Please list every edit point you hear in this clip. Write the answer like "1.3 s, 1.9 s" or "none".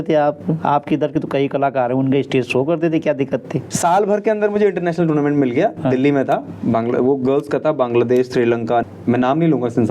3.7 s, 8.8 s